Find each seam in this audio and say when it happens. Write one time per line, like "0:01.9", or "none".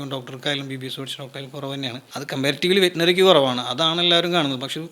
0:02.0